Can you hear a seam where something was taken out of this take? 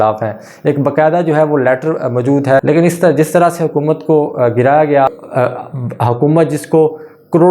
yes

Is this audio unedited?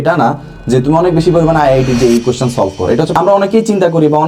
no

